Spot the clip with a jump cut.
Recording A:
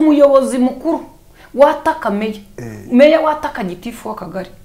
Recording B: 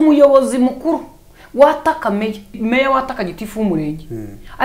B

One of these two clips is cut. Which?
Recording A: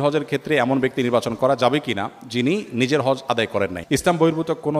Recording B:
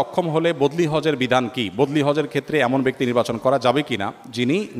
A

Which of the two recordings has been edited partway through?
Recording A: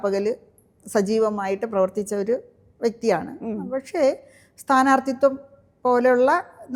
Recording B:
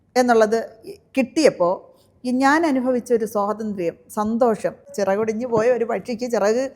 B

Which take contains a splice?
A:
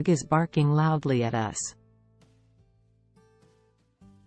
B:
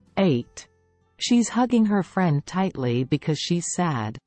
A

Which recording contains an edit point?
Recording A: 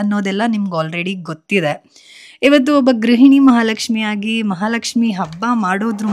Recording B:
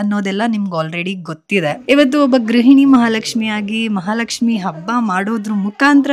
B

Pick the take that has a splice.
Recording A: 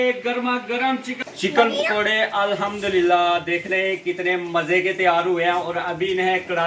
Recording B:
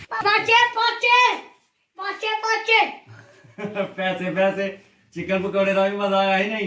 A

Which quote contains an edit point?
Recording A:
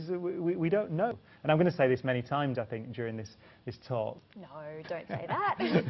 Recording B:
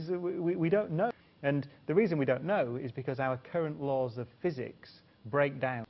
B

